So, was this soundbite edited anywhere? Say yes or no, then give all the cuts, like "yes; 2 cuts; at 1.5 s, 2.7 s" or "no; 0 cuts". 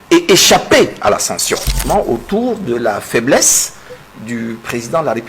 yes; 1 cut; at 1.8 s